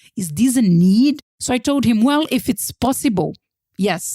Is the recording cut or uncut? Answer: cut